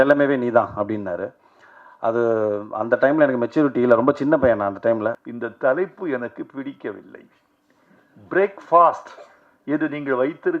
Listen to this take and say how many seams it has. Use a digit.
1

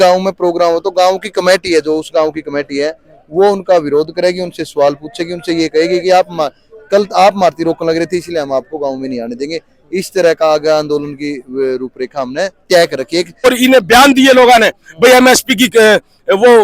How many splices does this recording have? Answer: 1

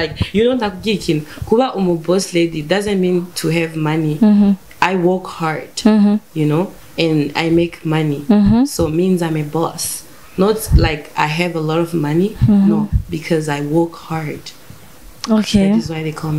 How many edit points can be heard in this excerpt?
0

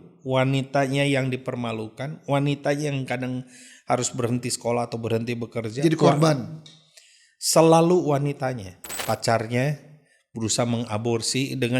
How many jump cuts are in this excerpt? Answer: 1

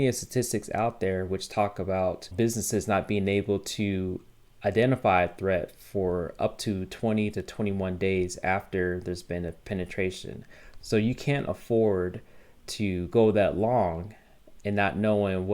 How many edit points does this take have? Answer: 1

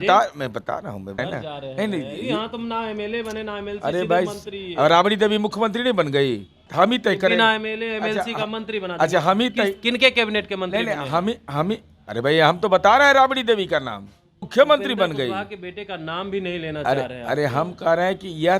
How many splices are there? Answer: 3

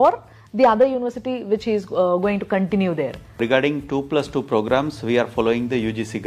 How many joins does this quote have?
1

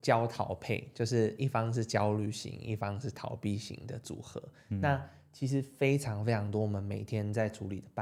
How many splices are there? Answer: 0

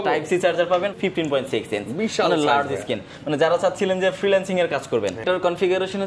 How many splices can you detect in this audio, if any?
2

